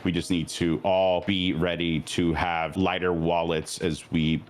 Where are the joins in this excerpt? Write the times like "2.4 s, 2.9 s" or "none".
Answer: 1.2 s, 2.7 s